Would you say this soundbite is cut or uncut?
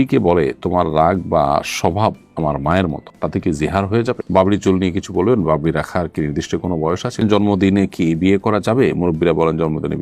cut